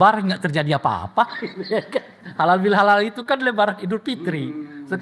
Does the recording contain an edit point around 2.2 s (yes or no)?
yes